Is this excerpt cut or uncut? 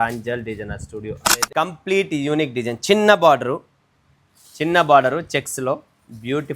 cut